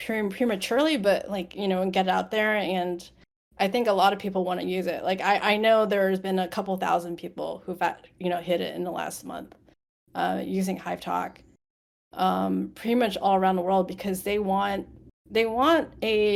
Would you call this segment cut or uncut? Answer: uncut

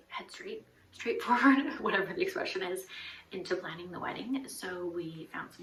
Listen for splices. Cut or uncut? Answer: uncut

